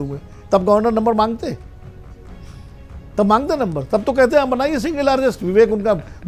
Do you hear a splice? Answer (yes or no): no